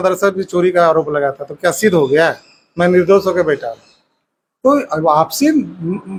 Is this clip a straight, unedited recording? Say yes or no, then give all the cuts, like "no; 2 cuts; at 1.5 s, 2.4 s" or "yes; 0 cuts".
yes; 0 cuts